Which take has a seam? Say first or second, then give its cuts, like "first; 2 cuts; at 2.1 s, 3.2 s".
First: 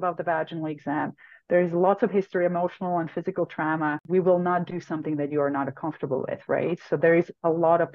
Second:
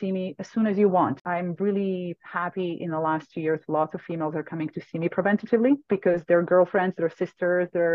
second; 1 cut; at 1.2 s